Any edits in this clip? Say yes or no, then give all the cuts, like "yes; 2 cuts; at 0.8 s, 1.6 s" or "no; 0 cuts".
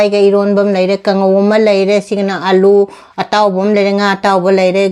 no; 0 cuts